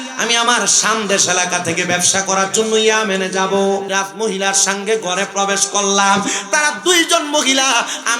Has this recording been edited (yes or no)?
yes